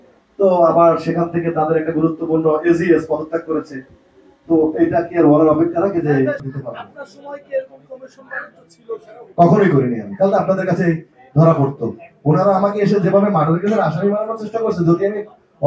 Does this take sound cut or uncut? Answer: cut